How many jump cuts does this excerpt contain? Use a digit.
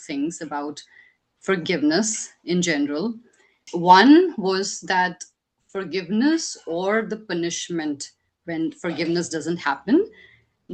1